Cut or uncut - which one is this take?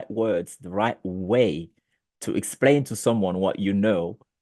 uncut